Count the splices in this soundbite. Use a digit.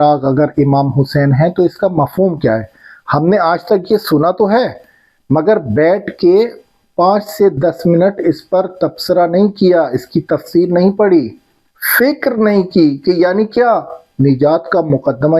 1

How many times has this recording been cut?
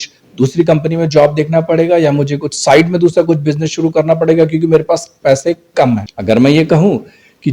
1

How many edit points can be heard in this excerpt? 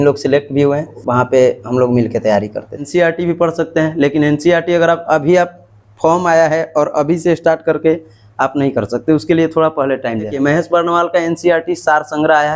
3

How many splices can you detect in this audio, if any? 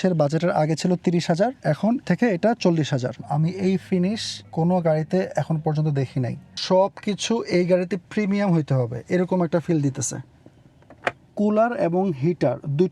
5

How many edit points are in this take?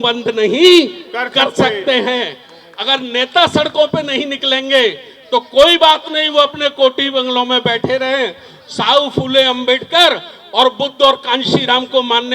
0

